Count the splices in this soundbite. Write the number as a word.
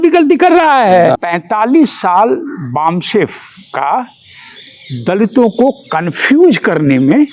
one